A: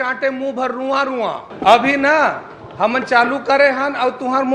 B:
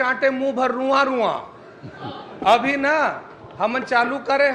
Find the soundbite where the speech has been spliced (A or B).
A